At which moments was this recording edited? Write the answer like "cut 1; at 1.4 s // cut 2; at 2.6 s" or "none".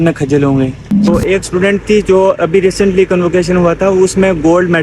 cut 1; at 1.1 s